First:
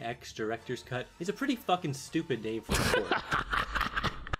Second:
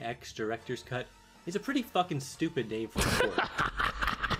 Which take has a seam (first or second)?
first